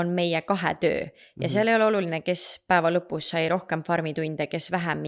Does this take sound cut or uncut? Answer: uncut